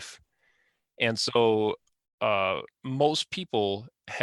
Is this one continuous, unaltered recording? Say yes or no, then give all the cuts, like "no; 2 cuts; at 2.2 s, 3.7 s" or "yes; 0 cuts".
yes; 0 cuts